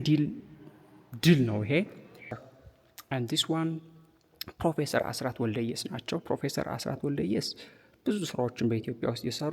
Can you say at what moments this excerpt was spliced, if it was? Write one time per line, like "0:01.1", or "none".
0:02.4

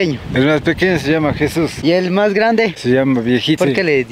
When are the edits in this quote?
none

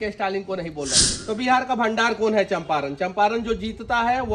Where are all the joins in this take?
0:01.1

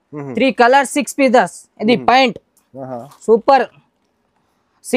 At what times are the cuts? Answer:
none

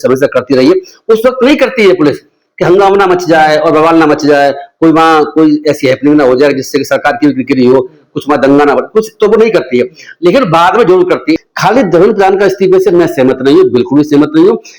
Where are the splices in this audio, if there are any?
0:11.4

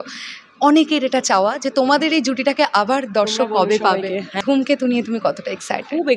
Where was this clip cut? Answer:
0:04.3

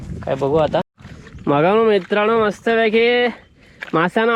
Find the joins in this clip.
0:01.0

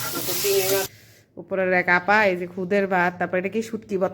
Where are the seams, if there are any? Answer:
0:00.9

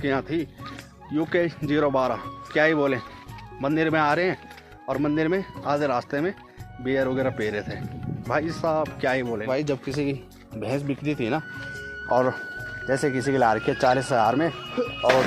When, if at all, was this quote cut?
0:02.3
0:09.5

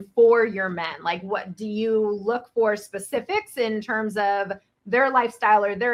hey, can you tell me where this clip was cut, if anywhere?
none

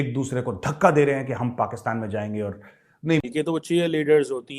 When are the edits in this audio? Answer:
0:03.2

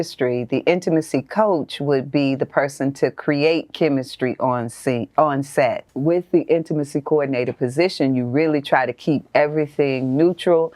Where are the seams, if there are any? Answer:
0:05.9

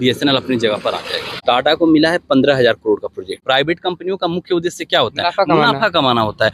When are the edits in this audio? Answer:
0:01.3
0:03.4

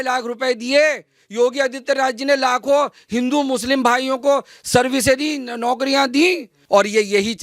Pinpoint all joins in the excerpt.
0:06.5

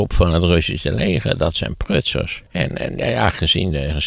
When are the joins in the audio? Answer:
0:02.3

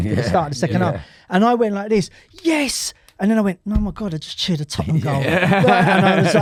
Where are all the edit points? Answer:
none

